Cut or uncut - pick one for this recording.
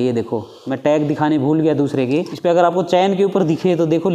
cut